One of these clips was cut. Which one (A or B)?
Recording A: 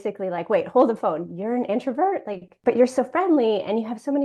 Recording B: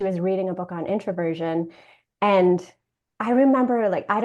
A